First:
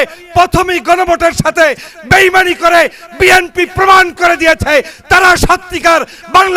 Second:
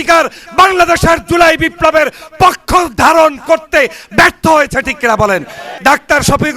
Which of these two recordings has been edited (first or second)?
second